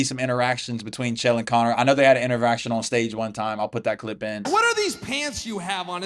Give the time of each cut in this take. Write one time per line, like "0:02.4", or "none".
none